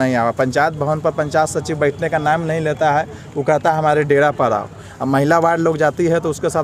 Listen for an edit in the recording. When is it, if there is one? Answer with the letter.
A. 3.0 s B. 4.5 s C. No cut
C